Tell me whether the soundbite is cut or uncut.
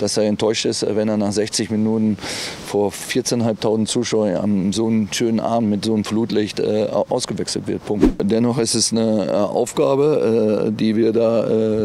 cut